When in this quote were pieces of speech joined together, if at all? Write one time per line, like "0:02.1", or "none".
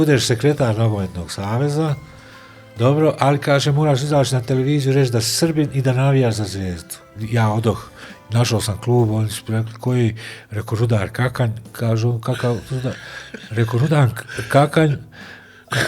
0:07.2